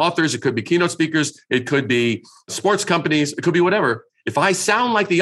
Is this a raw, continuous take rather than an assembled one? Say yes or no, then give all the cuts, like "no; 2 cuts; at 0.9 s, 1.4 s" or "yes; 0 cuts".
yes; 0 cuts